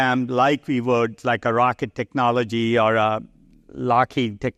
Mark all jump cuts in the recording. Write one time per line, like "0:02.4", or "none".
none